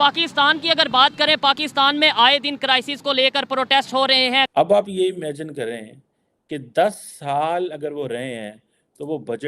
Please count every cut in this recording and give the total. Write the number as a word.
one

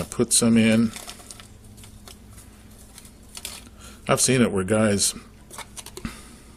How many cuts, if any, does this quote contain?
one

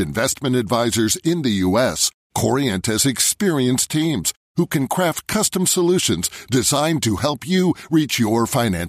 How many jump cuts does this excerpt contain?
zero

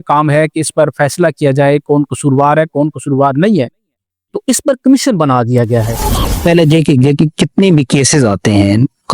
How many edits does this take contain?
one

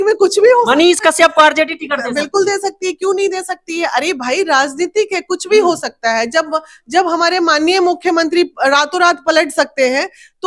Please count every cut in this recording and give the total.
zero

